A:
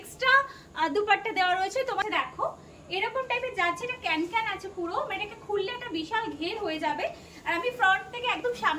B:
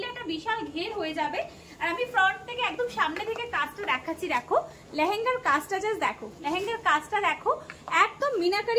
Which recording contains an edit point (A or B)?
A